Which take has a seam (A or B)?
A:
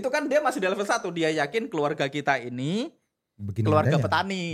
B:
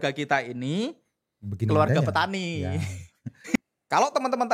B